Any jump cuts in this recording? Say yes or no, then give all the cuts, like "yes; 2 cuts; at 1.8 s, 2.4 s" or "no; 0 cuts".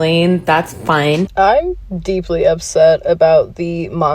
yes; 1 cut; at 1.3 s